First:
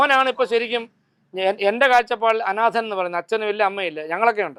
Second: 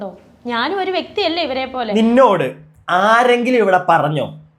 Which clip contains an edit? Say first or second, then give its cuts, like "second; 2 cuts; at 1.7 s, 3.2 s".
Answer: second; 1 cut; at 1.9 s